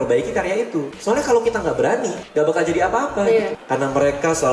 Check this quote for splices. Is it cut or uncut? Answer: cut